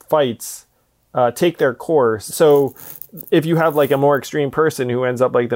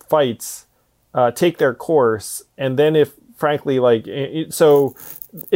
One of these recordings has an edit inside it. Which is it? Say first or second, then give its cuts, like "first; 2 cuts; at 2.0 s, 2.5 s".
first; 1 cut; at 2.3 s